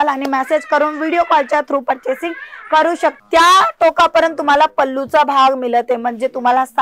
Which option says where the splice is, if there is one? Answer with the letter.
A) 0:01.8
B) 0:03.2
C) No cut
B